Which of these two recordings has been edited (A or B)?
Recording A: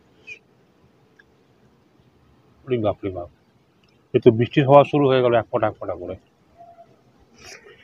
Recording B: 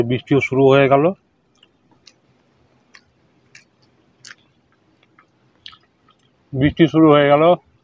B